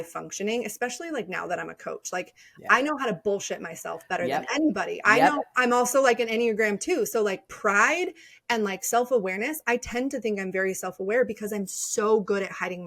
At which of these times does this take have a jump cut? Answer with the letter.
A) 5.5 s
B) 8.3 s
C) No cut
A